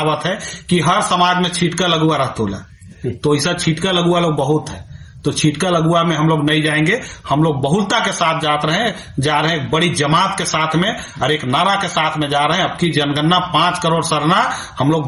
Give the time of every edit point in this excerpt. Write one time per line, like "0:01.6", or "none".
none